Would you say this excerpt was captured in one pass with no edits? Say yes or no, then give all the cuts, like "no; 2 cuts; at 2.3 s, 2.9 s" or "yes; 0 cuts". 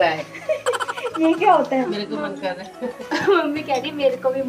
no; 1 cut; at 1.9 s